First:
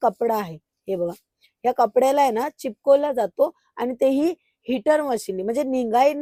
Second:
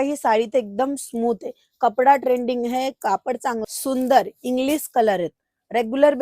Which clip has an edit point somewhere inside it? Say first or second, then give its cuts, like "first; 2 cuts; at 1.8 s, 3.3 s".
second; 1 cut; at 3.6 s